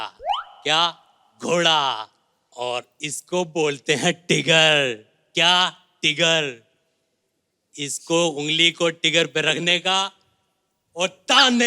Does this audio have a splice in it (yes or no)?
no